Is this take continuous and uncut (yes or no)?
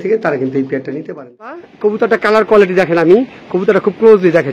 no